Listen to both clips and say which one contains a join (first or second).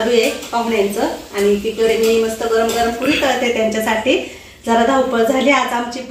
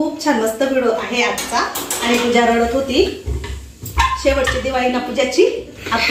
second